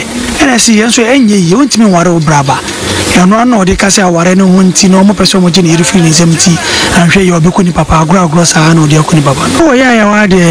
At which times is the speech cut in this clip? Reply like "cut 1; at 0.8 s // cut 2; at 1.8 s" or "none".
none